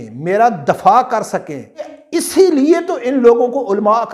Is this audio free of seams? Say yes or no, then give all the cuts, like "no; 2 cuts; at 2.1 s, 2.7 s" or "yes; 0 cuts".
no; 1 cut; at 2.0 s